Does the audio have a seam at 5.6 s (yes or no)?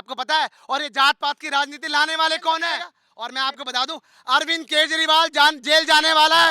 no